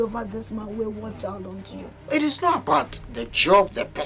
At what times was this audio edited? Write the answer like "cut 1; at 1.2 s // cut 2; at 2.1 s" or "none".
cut 1; at 1.9 s